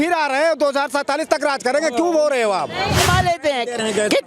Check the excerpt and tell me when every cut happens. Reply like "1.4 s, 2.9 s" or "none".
3.0 s

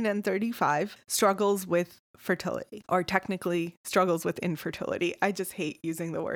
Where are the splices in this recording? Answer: 1.0 s, 2.7 s

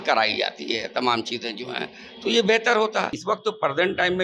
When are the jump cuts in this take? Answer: 3.2 s

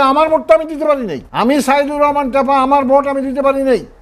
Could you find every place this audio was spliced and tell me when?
1.2 s

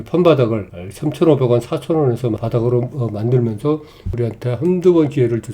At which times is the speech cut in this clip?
2.4 s, 4.1 s

